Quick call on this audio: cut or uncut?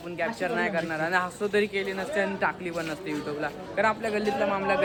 uncut